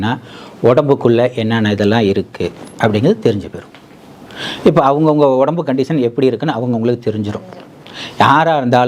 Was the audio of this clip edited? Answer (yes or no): no